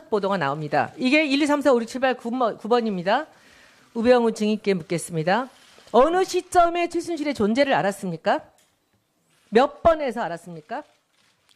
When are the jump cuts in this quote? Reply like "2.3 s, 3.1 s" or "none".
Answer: 7.0 s

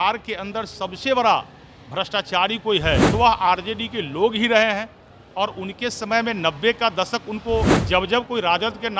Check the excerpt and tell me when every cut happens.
3.1 s, 7.8 s

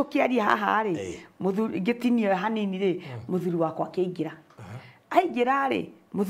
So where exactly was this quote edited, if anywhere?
none

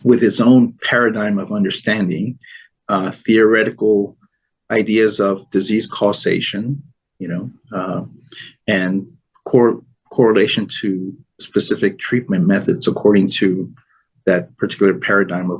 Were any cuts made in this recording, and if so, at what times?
none

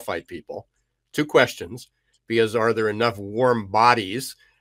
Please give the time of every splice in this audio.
none

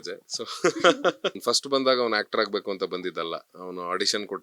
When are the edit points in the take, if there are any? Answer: 1.4 s

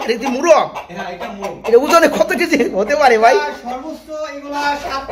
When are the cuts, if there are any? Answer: none

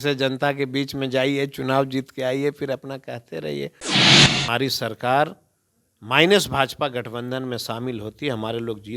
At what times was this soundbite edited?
4.2 s

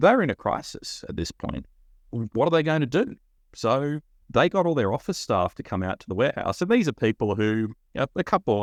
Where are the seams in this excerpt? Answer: none

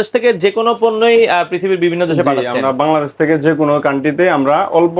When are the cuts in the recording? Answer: none

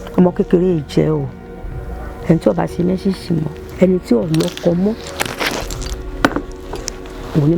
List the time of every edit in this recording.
3.6 s

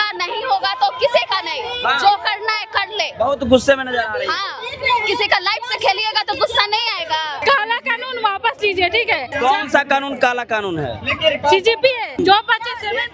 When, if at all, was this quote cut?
7.4 s, 9.3 s, 12.1 s

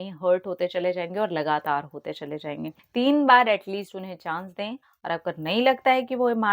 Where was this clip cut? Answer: 2.8 s

